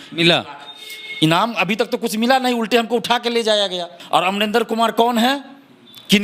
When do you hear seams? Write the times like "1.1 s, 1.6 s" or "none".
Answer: 4.0 s